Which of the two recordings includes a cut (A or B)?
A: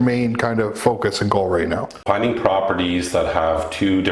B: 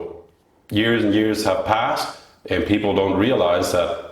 A